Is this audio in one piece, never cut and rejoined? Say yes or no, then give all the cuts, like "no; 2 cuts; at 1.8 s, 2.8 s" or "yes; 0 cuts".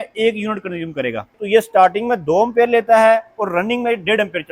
no; 1 cut; at 1.4 s